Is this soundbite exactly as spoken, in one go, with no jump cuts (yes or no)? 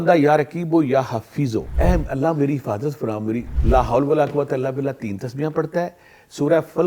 no